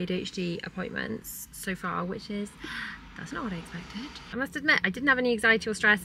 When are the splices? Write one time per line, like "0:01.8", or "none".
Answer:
0:04.2